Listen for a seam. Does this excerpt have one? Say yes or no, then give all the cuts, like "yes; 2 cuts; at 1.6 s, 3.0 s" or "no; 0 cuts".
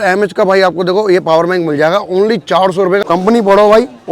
yes; 1 cut; at 3.0 s